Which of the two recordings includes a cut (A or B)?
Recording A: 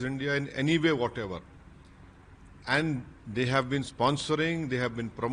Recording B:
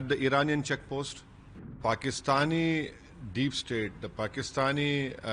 B